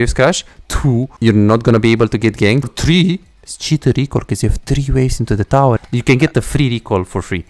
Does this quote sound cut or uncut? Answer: cut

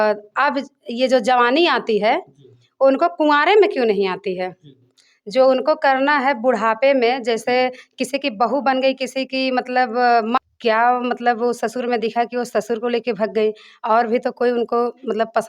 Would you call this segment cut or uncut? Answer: cut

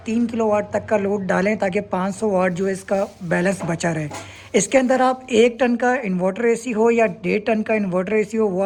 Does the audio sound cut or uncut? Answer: uncut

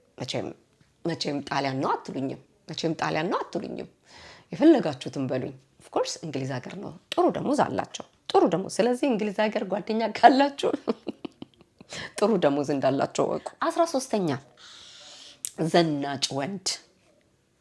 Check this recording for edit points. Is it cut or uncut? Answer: cut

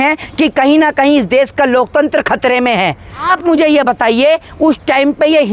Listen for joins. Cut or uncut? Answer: cut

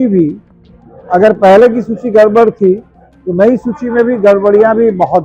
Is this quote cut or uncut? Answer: uncut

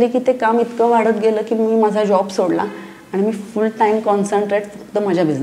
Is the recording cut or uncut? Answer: uncut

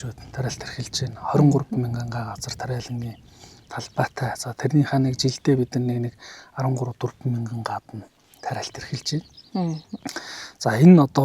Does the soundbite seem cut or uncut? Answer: uncut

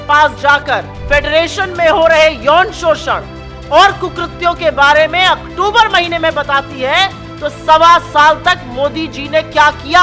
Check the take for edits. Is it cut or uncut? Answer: cut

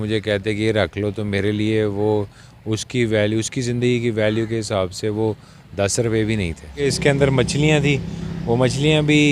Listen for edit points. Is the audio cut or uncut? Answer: cut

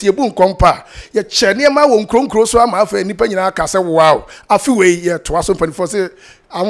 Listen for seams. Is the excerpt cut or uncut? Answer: uncut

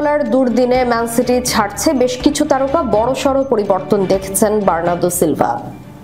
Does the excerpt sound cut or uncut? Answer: uncut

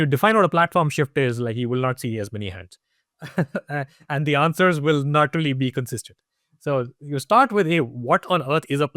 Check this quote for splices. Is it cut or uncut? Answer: uncut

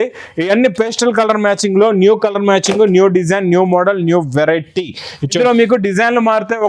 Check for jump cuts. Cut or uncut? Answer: cut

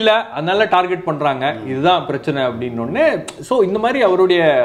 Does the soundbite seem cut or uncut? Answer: uncut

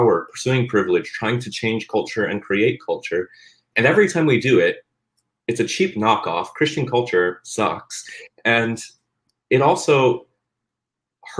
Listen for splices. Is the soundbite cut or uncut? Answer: uncut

